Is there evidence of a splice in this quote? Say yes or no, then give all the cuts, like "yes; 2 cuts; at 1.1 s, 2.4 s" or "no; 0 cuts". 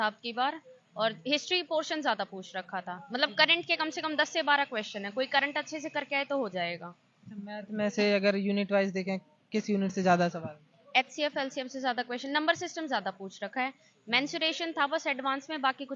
no; 0 cuts